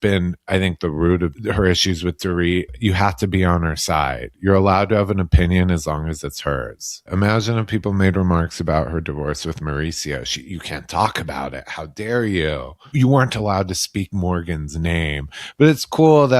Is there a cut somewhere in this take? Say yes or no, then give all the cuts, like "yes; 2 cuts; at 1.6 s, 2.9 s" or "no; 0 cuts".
yes; 4 cuts; at 1.4 s, 2.7 s, 7.0 s, 12.8 s